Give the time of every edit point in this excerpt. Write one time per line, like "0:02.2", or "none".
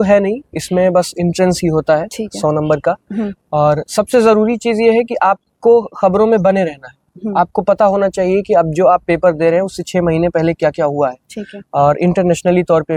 none